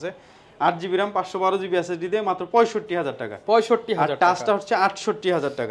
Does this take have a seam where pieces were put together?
no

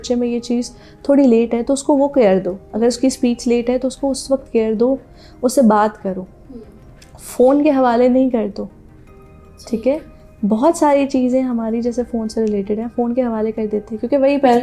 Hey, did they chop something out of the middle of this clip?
no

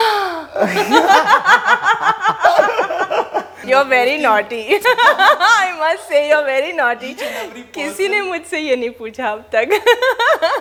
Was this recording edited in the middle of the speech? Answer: no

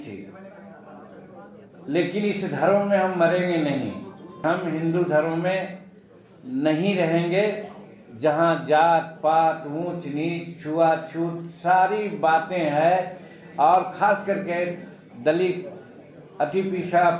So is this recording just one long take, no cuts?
no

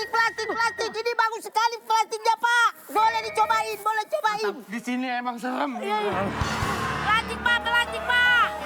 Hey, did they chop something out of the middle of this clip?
no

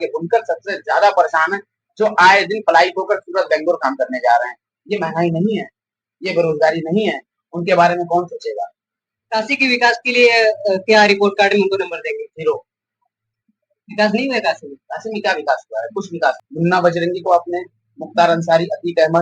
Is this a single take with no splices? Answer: no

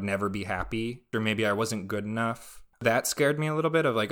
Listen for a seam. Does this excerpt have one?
yes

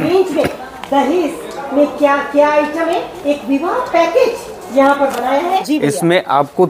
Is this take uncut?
no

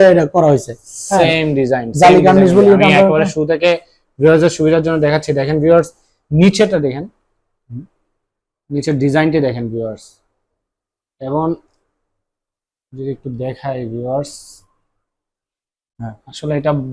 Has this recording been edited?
no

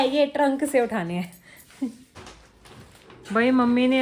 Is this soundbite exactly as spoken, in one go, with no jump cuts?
yes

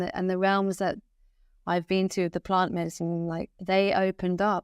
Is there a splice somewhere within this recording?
yes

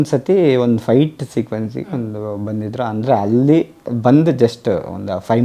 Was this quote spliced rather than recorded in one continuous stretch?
no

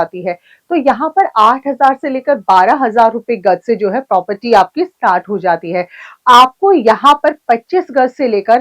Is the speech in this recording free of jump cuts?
yes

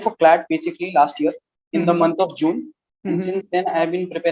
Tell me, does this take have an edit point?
no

